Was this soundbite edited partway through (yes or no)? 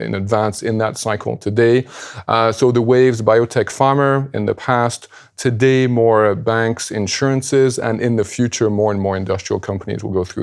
no